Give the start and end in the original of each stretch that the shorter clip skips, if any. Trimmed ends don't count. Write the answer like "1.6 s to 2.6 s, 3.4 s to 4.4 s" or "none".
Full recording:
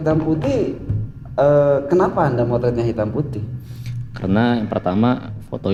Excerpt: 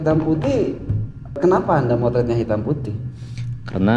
1.3 s to 1.8 s